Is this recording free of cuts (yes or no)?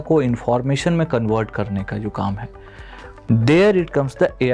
yes